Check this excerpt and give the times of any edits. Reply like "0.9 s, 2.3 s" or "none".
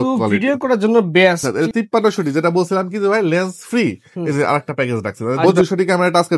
1.5 s, 5.4 s